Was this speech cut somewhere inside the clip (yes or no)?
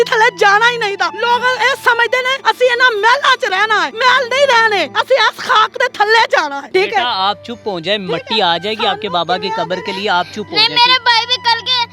yes